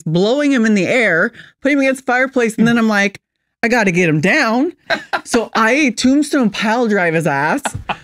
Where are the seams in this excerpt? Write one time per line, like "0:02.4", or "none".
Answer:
0:04.9